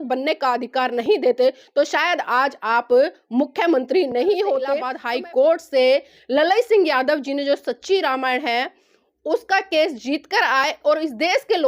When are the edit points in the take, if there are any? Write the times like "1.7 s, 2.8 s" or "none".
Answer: 4.9 s